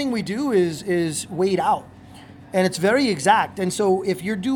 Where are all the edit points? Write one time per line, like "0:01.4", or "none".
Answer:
none